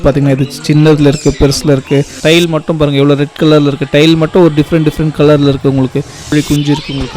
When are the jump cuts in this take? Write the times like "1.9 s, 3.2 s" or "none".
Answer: 2.1 s, 6.2 s